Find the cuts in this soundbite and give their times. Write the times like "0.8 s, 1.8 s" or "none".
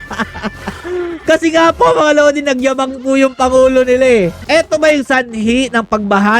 4.4 s